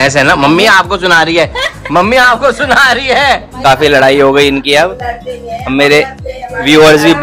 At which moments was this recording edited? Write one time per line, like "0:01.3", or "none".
0:03.5